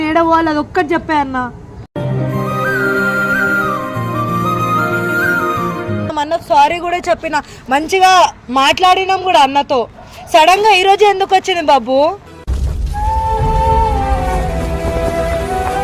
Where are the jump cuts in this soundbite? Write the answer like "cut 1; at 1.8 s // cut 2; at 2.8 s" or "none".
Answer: cut 1; at 6.1 s